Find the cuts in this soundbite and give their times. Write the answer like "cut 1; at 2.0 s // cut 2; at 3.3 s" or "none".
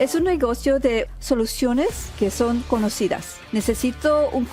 cut 1; at 1.1 s // cut 2; at 2.1 s // cut 3; at 3.4 s

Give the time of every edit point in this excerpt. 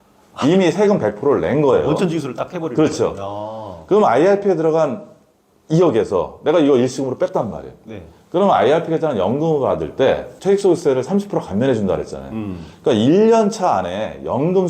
cut 1; at 10.3 s

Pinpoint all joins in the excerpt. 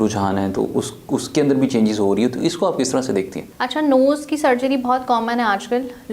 cut 1; at 3.4 s

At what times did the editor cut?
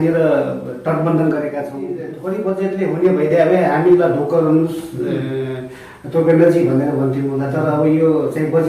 cut 1; at 2.1 s

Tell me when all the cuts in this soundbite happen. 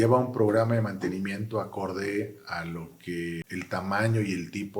cut 1; at 3.4 s

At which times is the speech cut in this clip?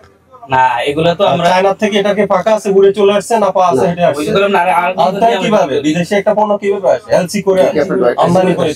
none

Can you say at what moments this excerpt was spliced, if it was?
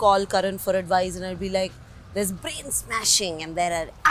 none

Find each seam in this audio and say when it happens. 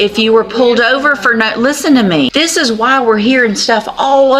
cut 1; at 2.3 s

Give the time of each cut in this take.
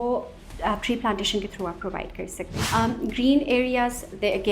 cut 1; at 2.6 s

